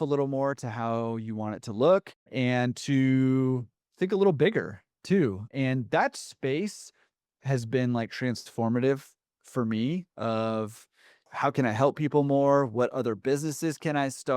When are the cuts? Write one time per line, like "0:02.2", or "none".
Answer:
0:02.3
0:05.5
0:11.3